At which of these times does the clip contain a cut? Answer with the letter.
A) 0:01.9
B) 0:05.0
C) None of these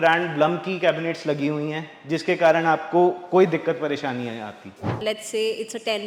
B